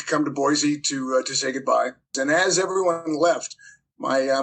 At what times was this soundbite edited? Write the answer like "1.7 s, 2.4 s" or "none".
2.1 s